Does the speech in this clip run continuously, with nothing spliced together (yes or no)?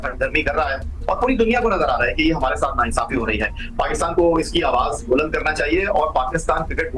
yes